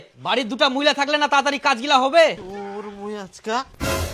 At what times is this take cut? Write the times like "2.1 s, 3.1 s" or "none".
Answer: 2.4 s